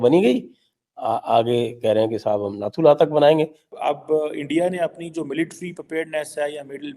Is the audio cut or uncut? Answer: cut